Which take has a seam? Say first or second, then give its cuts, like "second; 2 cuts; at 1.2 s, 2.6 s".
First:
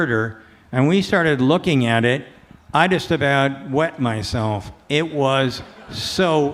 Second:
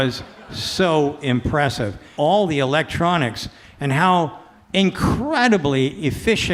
second; 1 cut; at 2.1 s